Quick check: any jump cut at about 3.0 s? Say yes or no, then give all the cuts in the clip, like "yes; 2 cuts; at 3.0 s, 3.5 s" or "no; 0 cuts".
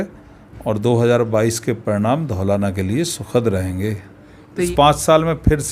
no; 1 cut; at 4.7 s